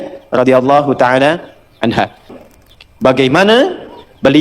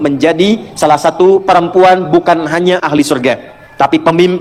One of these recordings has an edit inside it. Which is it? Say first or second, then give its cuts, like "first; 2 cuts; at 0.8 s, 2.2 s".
first; 1 cut; at 2.3 s